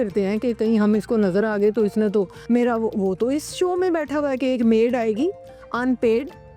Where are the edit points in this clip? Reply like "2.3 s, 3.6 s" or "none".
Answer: 2.4 s